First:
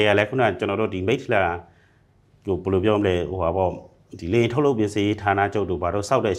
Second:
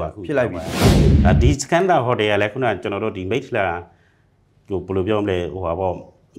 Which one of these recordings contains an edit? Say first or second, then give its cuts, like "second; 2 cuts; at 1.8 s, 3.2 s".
second; 1 cut; at 1.0 s